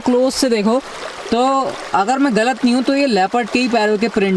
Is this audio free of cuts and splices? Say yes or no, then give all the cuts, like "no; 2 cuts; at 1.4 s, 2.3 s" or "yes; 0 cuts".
yes; 0 cuts